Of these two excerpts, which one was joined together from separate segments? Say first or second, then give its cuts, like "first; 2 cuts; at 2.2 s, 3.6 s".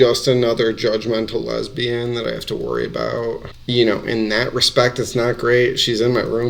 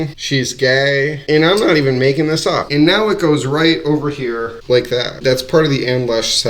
second; 2 cuts; at 1.2 s, 2.7 s